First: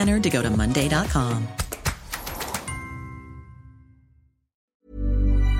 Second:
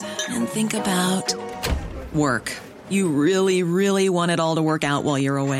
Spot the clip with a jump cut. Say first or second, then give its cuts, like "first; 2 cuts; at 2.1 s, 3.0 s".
first; 1 cut; at 4.6 s